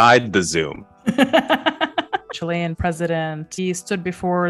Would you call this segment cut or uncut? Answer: cut